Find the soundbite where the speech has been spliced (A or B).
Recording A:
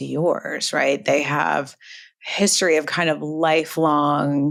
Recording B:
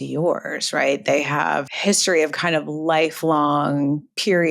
B